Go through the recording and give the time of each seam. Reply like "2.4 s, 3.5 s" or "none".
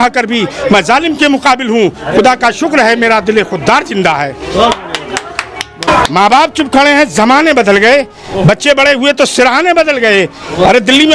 5.7 s